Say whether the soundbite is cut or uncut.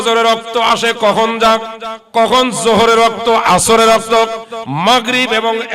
uncut